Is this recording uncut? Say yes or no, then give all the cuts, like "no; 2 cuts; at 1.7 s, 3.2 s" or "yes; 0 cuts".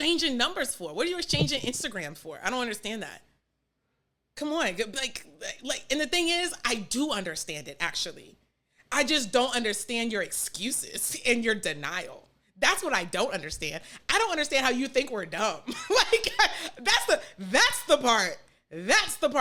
yes; 0 cuts